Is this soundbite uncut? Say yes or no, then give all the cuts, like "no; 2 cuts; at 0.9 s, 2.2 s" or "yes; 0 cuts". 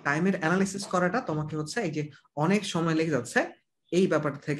yes; 0 cuts